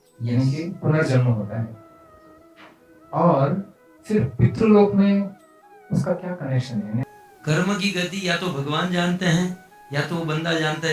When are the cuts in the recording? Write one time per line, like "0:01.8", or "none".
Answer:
0:07.0